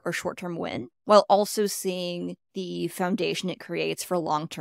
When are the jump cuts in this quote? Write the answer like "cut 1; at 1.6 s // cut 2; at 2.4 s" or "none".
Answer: cut 1; at 0.9 s // cut 2; at 2.4 s